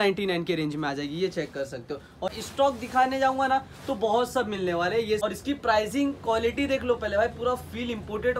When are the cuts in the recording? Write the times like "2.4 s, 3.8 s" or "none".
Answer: 2.3 s, 5.2 s